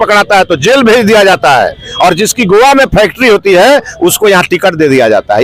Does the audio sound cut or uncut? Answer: uncut